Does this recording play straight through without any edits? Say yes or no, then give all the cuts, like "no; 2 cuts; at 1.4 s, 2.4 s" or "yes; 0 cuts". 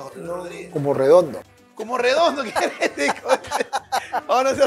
yes; 0 cuts